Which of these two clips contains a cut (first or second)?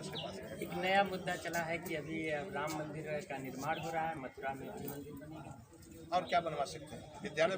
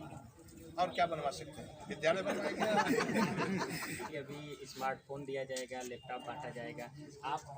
second